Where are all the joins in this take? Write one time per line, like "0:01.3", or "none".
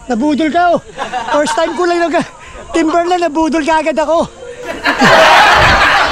0:04.8